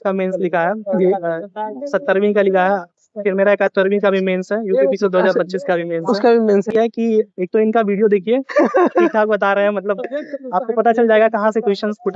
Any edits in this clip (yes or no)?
yes